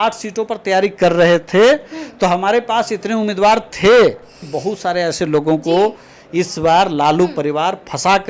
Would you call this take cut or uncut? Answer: cut